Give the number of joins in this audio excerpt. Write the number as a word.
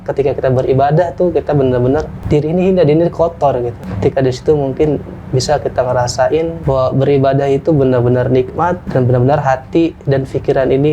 four